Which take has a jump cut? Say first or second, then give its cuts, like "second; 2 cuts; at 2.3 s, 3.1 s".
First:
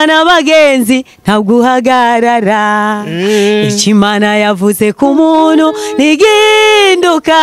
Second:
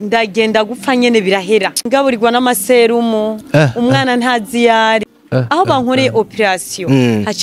second; 2 cuts; at 1.9 s, 5.1 s